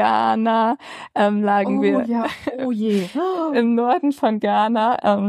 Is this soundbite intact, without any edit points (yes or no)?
yes